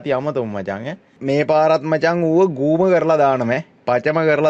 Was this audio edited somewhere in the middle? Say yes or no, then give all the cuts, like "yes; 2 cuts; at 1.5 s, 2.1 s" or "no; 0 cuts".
yes; 1 cut; at 1.2 s